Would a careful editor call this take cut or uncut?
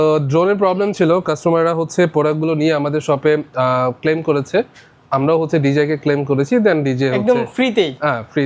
uncut